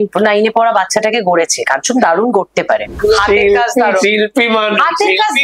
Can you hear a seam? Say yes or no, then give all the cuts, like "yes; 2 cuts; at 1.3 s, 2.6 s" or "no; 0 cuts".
yes; 1 cut; at 2.9 s